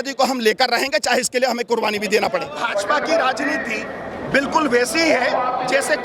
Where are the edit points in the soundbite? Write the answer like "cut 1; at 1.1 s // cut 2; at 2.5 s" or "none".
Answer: cut 1; at 2.6 s